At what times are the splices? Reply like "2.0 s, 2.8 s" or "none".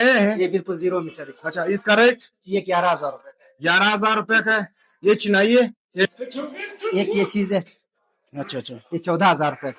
6.0 s